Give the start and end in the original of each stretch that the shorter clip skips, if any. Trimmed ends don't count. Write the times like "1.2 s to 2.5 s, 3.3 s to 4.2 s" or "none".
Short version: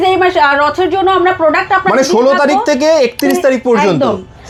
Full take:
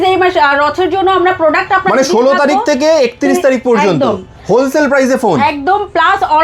none